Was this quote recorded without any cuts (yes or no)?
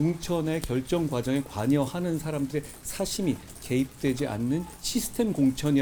yes